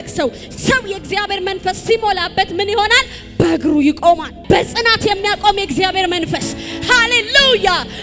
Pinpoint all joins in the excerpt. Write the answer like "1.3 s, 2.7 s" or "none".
4.3 s